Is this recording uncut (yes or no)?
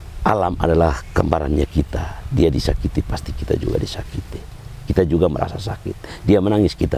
yes